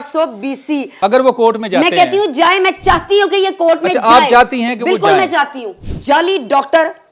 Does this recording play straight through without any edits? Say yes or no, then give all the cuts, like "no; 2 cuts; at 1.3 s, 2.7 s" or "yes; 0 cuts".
no; 2 cuts; at 1.0 s, 5.8 s